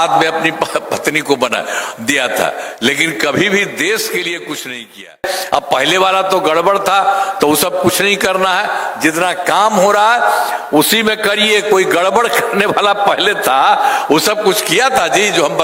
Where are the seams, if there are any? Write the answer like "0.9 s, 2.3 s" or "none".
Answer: 5.3 s